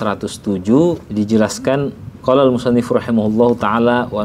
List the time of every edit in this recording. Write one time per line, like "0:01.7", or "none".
0:01.0
0:02.1